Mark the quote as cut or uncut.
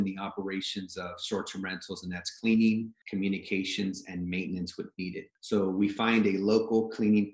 cut